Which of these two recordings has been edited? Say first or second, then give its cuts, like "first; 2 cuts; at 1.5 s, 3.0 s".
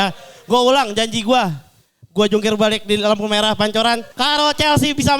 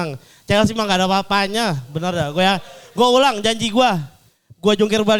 first; 1 cut; at 4.1 s